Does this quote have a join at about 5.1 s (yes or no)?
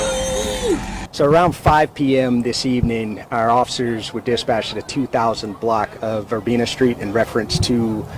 no